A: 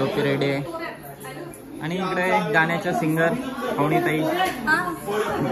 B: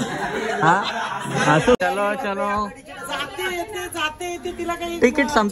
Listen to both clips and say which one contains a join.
B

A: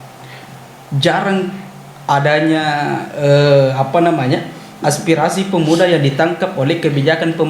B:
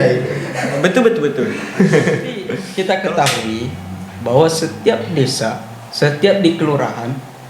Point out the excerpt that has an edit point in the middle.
B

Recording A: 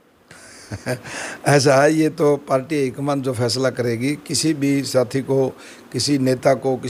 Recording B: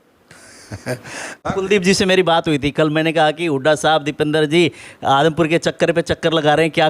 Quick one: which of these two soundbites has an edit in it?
B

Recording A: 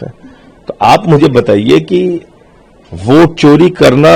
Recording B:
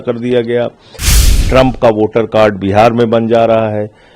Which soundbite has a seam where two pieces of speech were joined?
B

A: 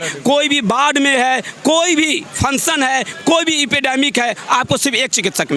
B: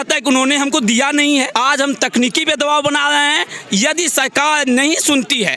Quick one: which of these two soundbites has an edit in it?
B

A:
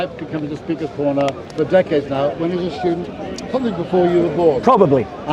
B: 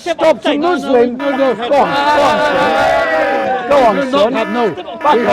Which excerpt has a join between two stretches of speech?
A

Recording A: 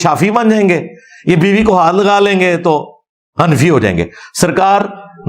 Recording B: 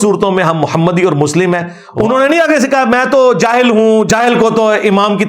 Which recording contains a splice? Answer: B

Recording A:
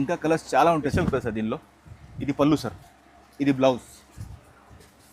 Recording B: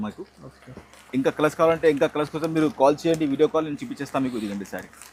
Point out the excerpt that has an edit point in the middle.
A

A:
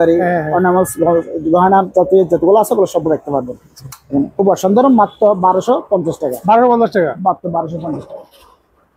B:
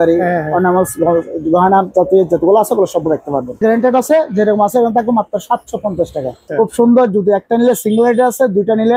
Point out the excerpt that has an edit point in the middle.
B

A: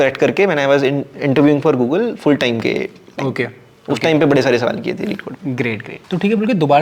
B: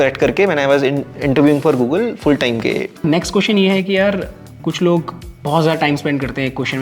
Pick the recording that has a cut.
B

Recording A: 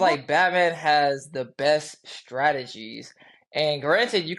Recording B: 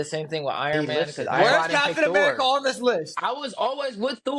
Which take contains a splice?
B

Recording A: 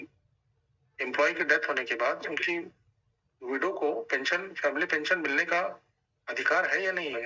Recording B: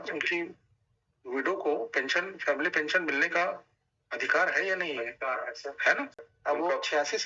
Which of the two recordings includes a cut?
B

